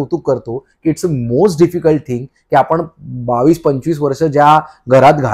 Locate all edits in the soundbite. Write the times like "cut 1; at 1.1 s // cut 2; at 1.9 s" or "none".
none